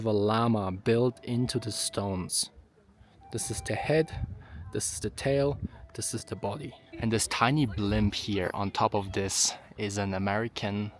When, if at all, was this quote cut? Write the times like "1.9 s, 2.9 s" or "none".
6.8 s